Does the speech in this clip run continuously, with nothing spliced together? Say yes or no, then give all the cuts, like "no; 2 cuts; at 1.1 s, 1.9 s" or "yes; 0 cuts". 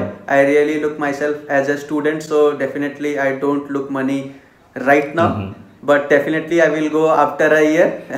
yes; 0 cuts